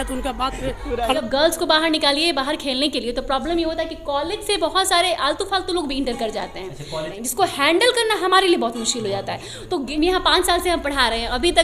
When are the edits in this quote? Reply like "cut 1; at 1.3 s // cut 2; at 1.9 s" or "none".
cut 1; at 1.1 s // cut 2; at 7.2 s // cut 3; at 9.9 s